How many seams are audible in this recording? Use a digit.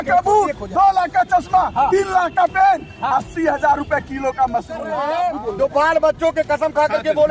1